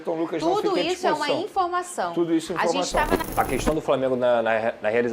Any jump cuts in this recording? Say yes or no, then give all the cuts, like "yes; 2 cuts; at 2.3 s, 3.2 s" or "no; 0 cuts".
yes; 1 cut; at 3.2 s